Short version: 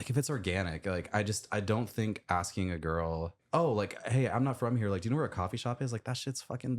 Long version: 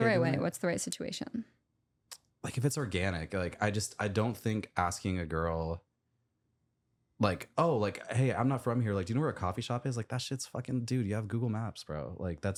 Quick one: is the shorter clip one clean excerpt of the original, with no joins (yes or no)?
no